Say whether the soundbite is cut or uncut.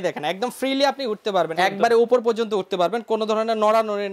cut